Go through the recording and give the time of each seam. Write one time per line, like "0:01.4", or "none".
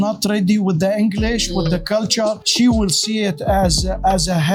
none